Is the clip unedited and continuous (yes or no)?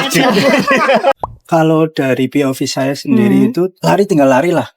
no